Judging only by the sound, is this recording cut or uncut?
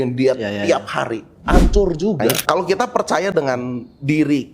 cut